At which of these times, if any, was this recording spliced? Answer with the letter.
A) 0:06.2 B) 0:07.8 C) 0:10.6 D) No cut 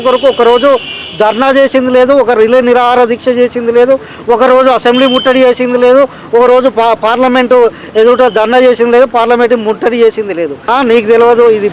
C